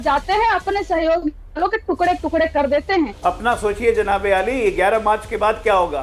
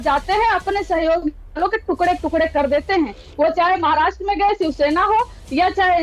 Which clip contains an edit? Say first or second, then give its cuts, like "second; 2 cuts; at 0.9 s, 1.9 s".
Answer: first; 1 cut; at 3.1 s